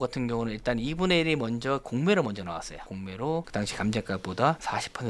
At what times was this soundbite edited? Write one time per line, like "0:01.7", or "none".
none